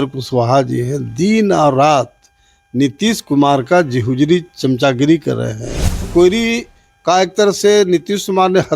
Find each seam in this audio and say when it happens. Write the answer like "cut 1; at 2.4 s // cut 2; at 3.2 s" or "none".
cut 1; at 6.1 s